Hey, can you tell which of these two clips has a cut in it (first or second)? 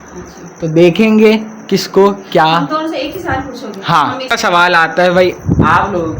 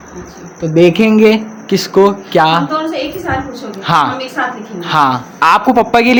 first